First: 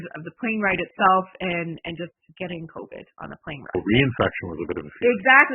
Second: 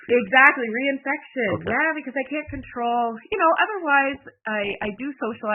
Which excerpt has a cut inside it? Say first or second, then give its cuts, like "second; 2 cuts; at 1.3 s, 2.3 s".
first; 2 cuts; at 2.2 s, 3.7 s